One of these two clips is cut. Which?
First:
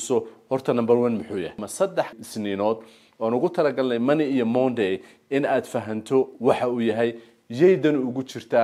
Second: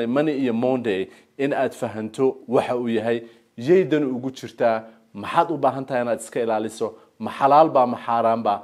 first; 1 cut; at 2.2 s

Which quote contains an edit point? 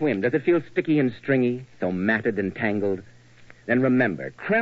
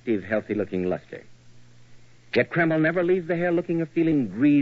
second; 1 cut; at 2.6 s

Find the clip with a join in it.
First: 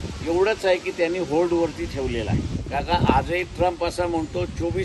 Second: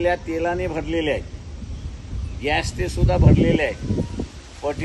first; 1 cut; at 2.6 s

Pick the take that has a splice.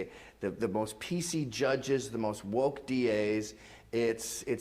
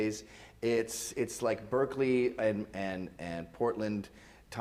first; 1 cut; at 2.1 s

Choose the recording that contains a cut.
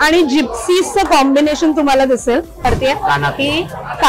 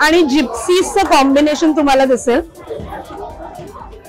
first; 1 cut; at 2.6 s

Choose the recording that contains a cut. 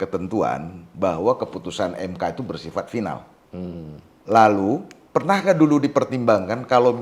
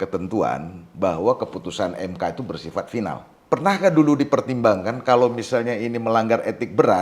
second; 1 cut; at 3.3 s

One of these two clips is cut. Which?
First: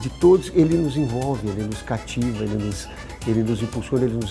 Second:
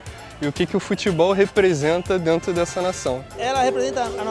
second; 1 cut; at 3.4 s

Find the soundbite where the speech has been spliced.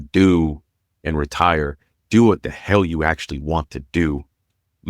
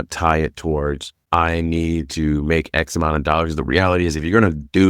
second; 1 cut; at 1.1 s

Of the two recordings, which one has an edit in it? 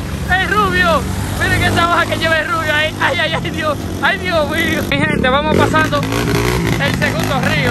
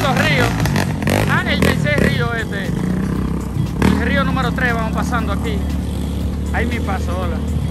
first; 1 cut; at 4.9 s

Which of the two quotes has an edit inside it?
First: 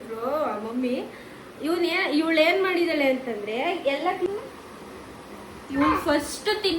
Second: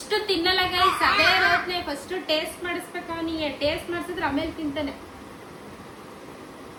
first; 1 cut; at 4.3 s

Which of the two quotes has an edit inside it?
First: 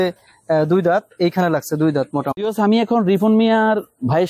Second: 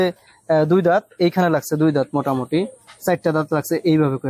first; 1 cut; at 2.3 s

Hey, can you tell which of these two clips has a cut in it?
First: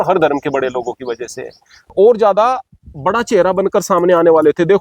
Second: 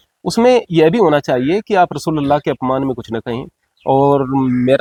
first; 1 cut; at 1.9 s

